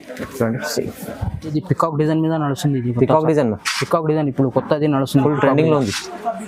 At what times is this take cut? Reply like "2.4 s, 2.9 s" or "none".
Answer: 1.5 s

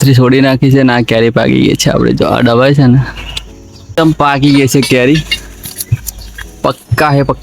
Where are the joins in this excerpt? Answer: 4.0 s

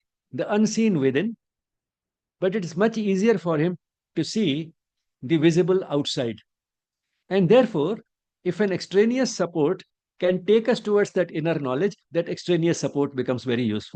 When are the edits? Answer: none

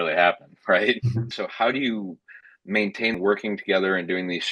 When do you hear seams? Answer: 1.3 s, 3.1 s

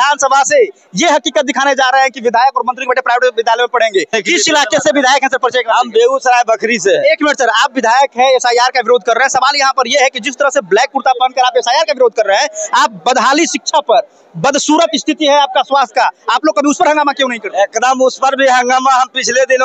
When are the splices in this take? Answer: 4.2 s

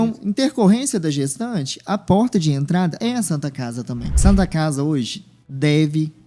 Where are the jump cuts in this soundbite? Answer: 3.0 s, 4.1 s

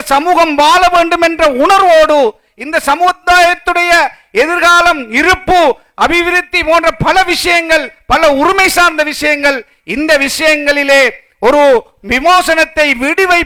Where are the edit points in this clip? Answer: none

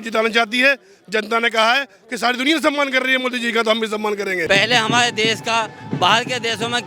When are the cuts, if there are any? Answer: 4.4 s

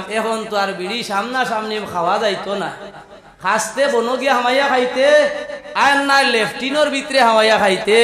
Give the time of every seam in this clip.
none

